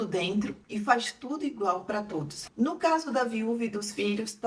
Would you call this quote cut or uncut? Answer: cut